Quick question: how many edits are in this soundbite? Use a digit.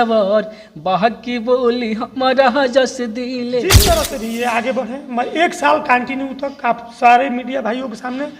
1